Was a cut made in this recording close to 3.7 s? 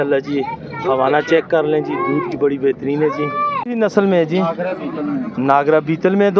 yes; 1 cut; at 3.7 s

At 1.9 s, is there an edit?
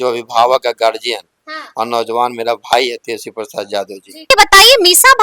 no; 1 cut; at 4.3 s

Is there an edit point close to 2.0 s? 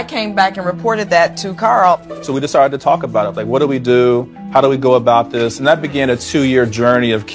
no; 1 cut; at 4.4 s

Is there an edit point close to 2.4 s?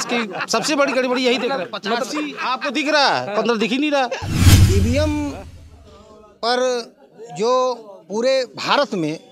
no; 1 cut; at 4.5 s

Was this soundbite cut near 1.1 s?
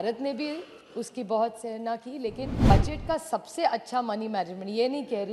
no; 1 cut; at 2.7 s

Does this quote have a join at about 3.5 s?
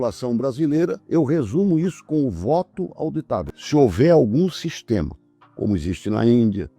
yes; 2 cuts; at 1.0 s, 3.5 s

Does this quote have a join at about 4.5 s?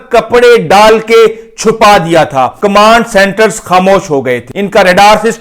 yes; 2 cuts; at 2.5 s, 4.5 s

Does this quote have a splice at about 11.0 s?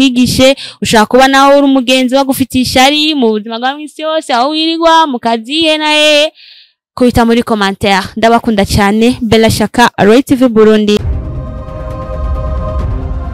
yes; 1 cut; at 11.0 s

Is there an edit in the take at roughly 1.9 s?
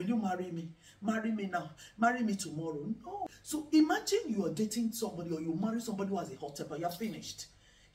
no; 1 cut; at 3.2 s

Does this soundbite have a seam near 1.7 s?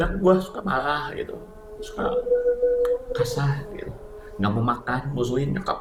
no; 0 cuts

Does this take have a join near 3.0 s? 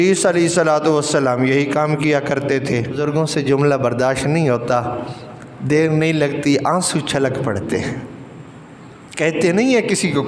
yes; 1 cut; at 3.0 s

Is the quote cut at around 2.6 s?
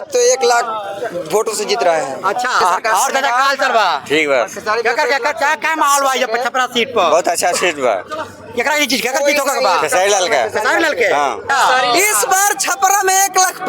yes; 2 cuts; at 2.6 s, 11.5 s

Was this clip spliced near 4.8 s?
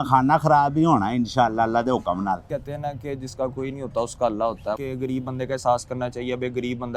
yes; 2 cuts; at 2.5 s, 4.8 s

